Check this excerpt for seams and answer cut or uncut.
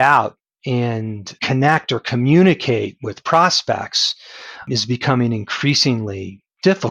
uncut